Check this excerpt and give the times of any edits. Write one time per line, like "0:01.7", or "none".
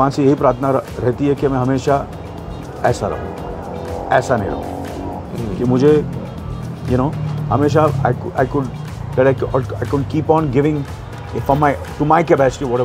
none